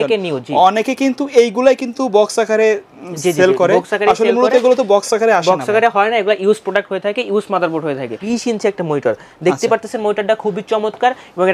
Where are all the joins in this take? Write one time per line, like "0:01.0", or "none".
0:08.2